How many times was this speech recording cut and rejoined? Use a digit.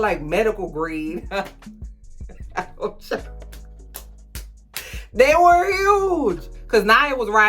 1